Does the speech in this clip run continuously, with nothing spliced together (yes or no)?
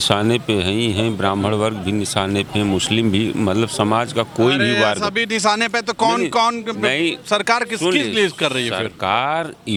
yes